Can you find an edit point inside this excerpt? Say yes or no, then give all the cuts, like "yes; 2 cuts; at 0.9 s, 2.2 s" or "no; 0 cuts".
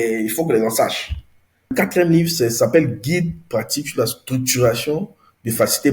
yes; 1 cut; at 1.7 s